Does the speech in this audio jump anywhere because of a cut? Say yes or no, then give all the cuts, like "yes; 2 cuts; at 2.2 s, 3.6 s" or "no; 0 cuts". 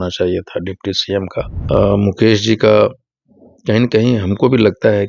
yes; 1 cut; at 1.6 s